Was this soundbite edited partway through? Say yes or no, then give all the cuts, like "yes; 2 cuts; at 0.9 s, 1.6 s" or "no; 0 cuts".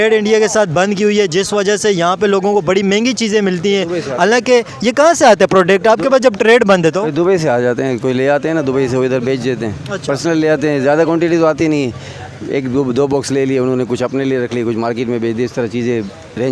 no; 0 cuts